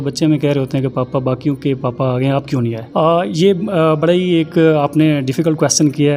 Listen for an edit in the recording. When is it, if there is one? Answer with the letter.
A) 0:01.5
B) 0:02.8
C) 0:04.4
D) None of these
B